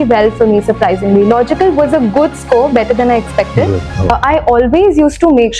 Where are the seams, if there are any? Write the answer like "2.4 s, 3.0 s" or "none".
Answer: 4.1 s